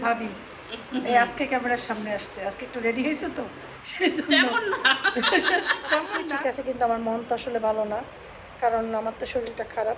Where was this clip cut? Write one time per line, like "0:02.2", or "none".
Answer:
0:06.2